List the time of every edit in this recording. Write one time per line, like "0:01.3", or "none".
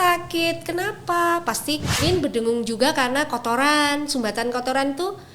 0:02.0